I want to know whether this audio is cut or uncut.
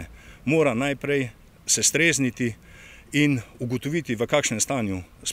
uncut